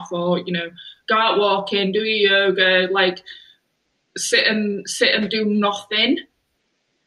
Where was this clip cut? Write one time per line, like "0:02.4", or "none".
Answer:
none